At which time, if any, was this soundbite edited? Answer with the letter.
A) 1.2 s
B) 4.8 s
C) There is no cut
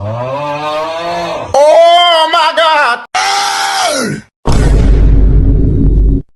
A